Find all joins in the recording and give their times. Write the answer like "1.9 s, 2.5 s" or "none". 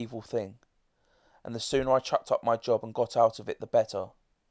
none